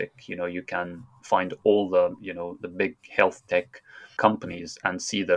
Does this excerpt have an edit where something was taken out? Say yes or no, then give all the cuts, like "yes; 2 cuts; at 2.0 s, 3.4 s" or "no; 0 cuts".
yes; 1 cut; at 4.1 s